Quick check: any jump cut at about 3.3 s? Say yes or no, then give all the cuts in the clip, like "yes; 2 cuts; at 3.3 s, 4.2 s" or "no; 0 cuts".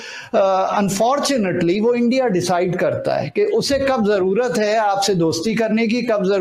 no; 0 cuts